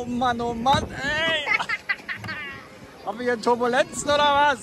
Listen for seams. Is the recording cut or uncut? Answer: uncut